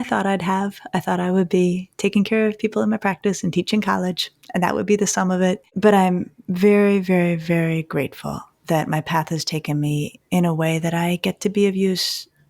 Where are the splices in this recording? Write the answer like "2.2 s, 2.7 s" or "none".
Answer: 5.7 s, 10.2 s